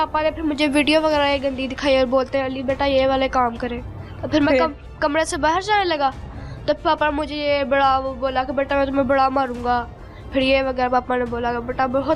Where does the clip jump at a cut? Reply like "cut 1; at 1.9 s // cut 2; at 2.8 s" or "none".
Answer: none